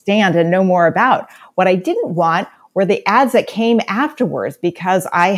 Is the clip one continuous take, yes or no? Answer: no